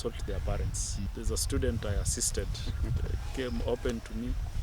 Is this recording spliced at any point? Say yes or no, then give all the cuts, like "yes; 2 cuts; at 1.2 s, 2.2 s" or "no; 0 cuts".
yes; 1 cut; at 1.1 s